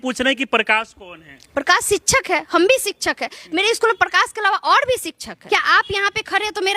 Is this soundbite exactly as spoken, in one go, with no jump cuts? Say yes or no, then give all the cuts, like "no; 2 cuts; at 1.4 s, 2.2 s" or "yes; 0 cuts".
no; 1 cut; at 5.3 s